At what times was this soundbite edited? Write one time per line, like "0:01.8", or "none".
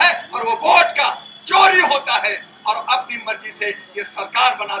none